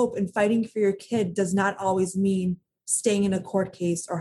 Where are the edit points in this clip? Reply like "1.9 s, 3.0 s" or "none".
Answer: none